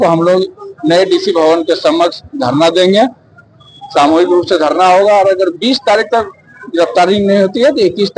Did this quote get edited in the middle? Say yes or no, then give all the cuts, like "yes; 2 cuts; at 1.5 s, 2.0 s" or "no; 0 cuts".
no; 0 cuts